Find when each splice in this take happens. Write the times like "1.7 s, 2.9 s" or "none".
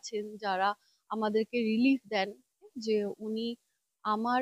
2.8 s